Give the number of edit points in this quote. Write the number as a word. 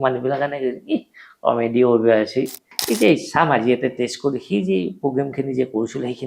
one